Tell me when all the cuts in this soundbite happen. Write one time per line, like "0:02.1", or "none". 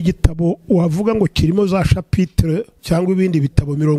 0:02.7